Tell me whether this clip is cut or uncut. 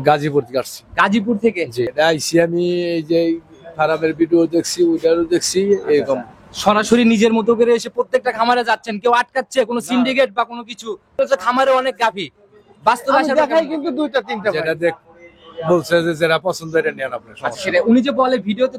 cut